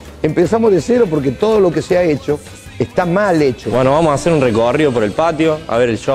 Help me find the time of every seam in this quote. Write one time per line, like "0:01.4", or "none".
0:03.7